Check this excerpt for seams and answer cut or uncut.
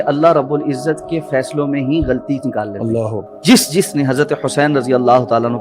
cut